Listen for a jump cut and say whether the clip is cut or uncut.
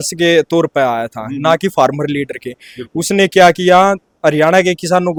uncut